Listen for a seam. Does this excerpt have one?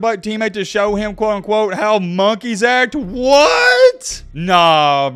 no; 0 cuts

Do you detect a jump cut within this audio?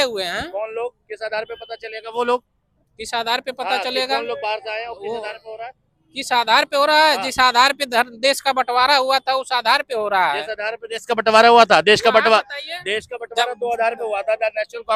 no; 0 cuts

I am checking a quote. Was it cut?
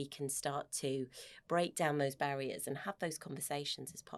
no; 0 cuts

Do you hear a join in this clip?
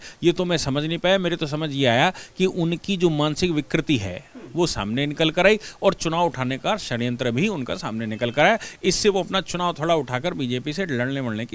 no; 0 cuts

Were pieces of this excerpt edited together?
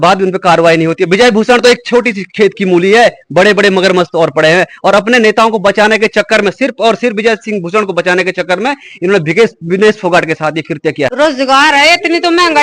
yes; 1 cut; at 11.1 s

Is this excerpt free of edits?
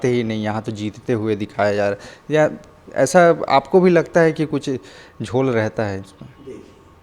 yes; 0 cuts

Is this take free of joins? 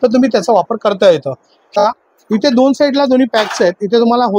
no; 1 cut; at 1.8 s

